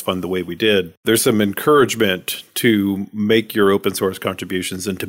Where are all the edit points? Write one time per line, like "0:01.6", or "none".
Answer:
0:00.9